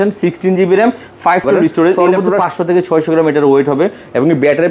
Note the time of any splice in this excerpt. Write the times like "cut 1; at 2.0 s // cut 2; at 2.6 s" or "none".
cut 1; at 2.2 s